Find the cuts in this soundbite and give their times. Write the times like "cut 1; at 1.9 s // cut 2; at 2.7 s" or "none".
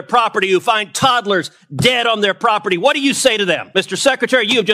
cut 1; at 3.6 s